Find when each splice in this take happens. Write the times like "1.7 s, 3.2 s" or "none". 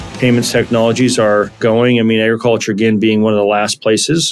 none